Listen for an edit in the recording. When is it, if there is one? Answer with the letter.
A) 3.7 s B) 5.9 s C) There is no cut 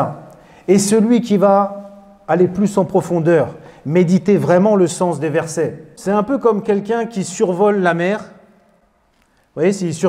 B